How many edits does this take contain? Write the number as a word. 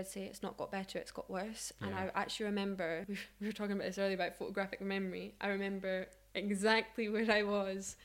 one